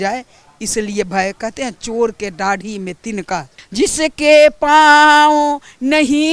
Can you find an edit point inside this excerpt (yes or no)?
yes